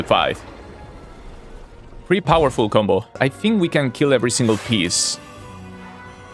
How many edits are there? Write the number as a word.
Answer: one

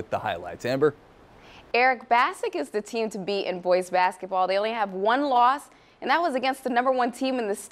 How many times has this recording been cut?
zero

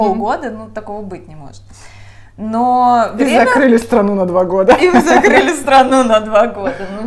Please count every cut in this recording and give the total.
zero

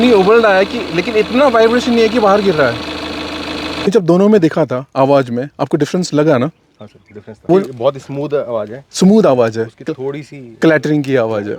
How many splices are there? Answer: two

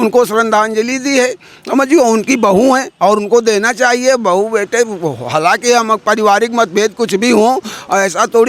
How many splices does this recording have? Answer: zero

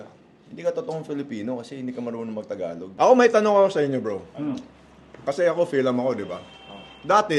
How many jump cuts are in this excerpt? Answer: one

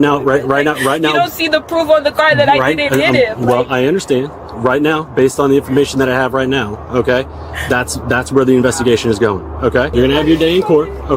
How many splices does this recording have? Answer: one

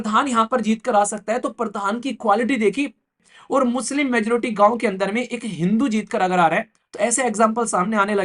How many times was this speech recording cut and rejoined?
one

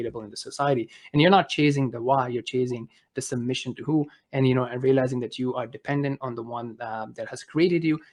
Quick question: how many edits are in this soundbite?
zero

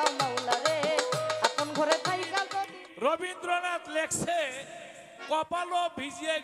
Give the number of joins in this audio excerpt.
one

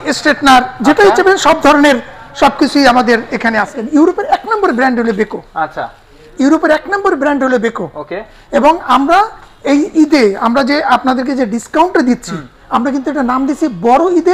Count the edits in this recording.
one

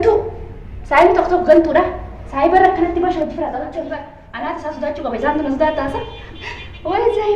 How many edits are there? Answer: one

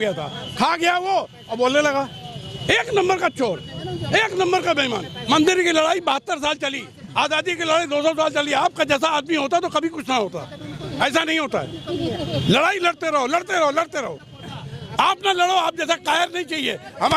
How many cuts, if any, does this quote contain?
two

